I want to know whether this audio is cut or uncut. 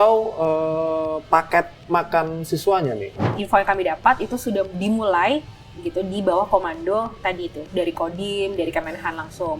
cut